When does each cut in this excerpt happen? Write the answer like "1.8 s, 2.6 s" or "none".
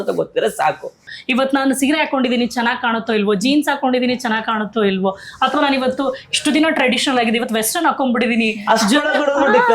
1.1 s